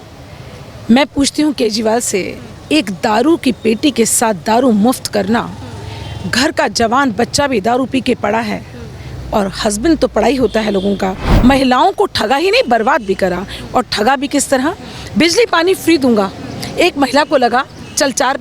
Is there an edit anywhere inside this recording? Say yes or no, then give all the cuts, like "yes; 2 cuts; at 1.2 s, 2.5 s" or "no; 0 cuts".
yes; 1 cut; at 11.3 s